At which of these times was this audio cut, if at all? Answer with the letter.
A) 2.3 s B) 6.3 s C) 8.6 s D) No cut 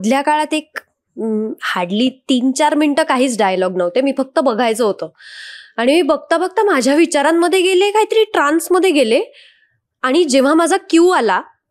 D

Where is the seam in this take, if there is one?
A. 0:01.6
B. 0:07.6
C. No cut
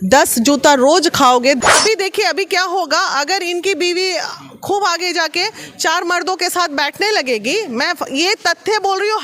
A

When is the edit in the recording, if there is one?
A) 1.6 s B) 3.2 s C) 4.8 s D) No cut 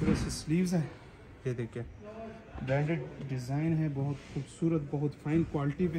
D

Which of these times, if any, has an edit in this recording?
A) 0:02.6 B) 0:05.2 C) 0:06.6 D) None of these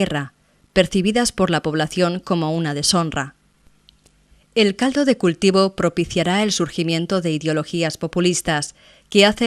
C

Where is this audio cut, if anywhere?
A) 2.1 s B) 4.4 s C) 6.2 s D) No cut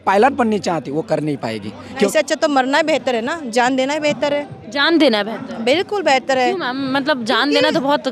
A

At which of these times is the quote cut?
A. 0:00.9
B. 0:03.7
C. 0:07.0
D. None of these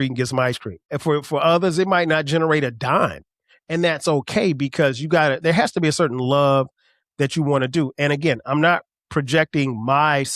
A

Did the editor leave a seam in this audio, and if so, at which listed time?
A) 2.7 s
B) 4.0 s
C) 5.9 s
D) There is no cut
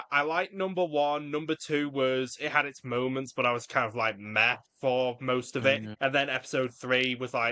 C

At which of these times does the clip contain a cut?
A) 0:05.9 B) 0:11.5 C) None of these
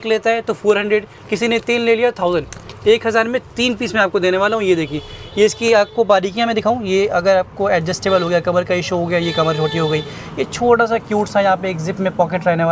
C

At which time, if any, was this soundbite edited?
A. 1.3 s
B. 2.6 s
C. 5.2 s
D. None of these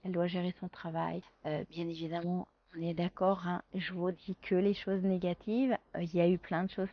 A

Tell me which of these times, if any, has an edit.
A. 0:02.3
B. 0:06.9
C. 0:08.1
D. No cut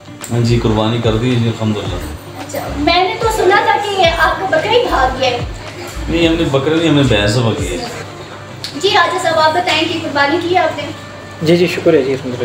C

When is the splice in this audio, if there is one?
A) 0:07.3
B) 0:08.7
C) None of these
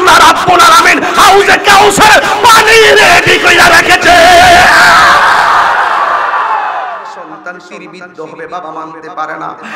A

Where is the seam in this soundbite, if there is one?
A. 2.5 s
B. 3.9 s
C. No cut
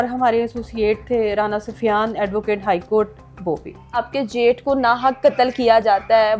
B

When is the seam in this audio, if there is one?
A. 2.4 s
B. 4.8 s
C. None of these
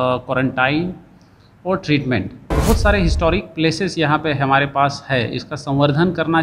A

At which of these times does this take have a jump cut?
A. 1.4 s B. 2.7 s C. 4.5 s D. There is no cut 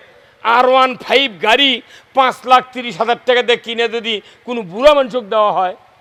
D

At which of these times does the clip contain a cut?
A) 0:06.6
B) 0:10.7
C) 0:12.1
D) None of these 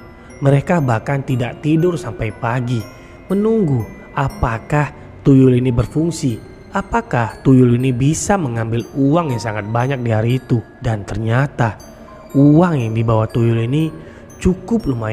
B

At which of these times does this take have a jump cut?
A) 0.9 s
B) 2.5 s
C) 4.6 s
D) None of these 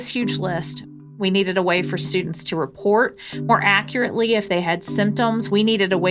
A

